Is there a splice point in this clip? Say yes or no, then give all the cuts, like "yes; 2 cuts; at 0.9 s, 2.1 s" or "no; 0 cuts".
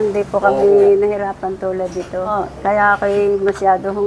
yes; 1 cut; at 2.3 s